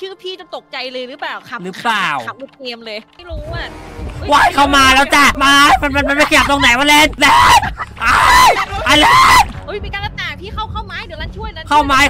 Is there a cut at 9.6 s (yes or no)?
yes